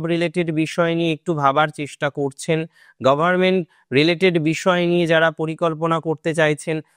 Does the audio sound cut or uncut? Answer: uncut